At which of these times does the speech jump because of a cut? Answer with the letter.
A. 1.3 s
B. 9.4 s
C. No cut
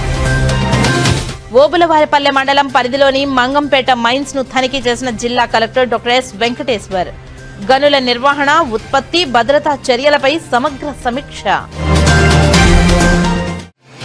C